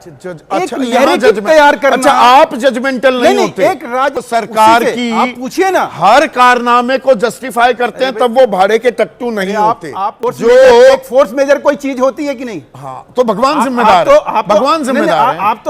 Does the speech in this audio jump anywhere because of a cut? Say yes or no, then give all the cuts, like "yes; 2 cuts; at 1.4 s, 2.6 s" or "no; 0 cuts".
yes; 2 cuts; at 4.2 s, 10.2 s